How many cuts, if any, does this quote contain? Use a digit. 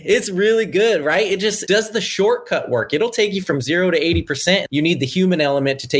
2